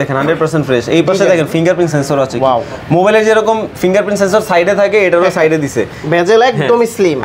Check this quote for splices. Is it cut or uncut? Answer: cut